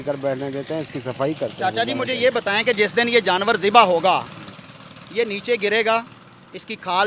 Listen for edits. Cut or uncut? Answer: uncut